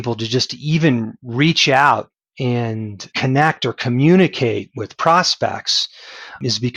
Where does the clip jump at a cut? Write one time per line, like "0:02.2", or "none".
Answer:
none